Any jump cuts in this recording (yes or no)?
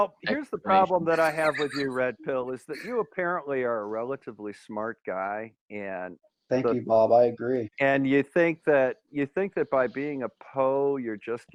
no